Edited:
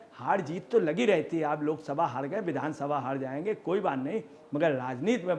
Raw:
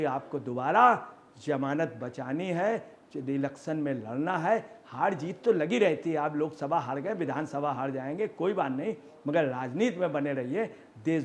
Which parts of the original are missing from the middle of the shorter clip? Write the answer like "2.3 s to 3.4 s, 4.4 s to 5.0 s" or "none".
none